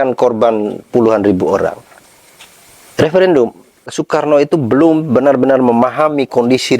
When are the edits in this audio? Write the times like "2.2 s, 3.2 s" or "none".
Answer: 4.0 s